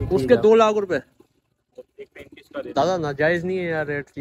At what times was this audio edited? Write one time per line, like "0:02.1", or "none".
none